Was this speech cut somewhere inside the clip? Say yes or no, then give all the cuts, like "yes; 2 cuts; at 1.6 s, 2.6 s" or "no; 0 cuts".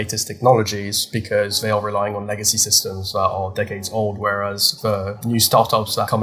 no; 0 cuts